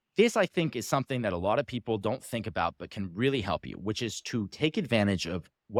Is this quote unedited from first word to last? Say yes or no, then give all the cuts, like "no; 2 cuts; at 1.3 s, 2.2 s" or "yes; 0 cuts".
yes; 0 cuts